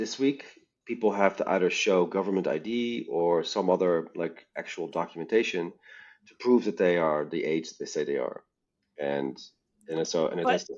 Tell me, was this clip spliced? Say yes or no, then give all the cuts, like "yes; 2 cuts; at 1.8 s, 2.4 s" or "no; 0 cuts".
no; 0 cuts